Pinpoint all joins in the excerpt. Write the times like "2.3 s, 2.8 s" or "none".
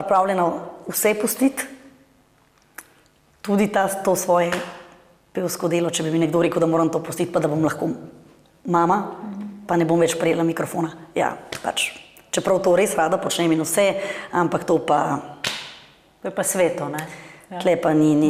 none